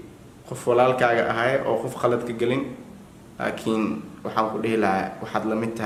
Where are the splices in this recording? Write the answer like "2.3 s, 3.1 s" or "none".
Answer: none